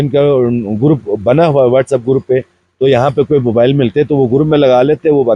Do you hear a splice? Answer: no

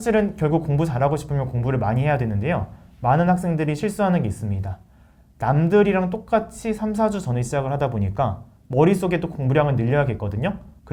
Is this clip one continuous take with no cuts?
yes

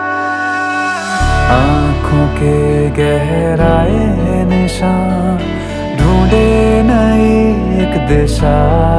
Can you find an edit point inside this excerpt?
no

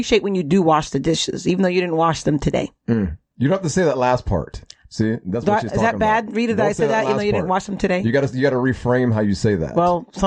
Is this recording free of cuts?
yes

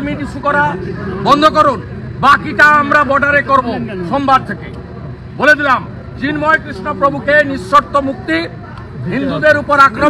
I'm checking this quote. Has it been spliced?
no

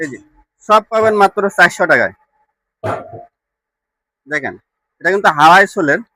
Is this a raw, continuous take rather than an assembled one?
yes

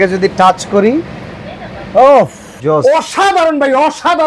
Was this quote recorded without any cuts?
no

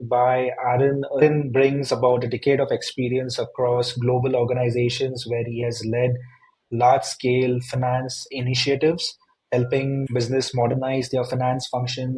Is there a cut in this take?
yes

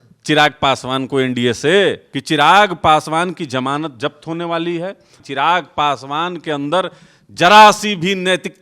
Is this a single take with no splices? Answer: no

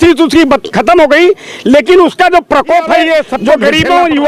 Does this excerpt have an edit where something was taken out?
yes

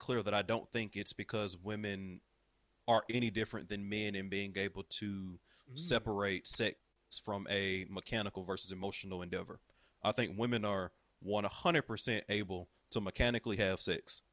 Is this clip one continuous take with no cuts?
yes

